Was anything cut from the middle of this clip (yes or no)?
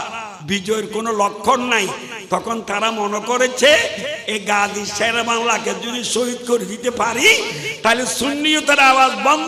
no